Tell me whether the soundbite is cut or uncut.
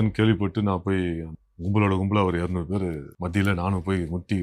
cut